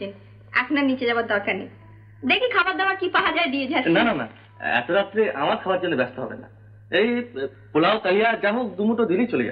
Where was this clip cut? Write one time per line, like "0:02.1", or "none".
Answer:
none